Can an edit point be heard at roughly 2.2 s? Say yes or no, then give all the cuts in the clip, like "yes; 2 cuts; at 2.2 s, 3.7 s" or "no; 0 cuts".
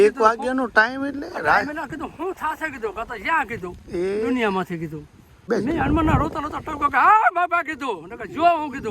no; 1 cut; at 5.5 s